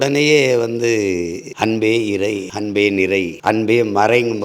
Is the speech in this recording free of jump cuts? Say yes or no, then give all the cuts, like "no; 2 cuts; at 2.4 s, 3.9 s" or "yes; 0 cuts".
no; 3 cuts; at 1.4 s, 2.5 s, 3.3 s